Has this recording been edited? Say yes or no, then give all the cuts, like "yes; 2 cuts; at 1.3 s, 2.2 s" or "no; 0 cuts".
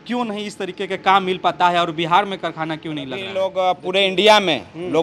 yes; 1 cut; at 3.4 s